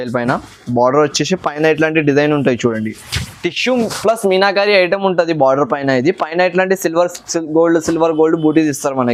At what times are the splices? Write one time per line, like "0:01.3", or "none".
none